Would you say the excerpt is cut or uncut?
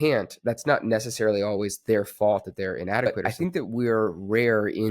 cut